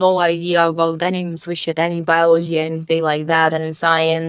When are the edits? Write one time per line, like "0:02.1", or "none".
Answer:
none